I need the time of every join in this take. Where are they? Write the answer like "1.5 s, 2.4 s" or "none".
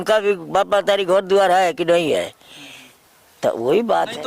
none